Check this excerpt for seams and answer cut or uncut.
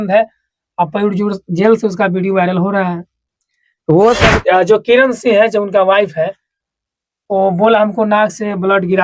cut